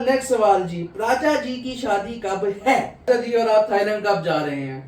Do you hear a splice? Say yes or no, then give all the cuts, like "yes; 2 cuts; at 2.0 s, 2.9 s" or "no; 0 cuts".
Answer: yes; 1 cut; at 3.1 s